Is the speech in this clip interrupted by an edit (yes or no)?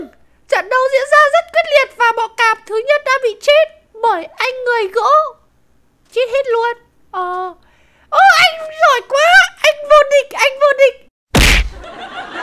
yes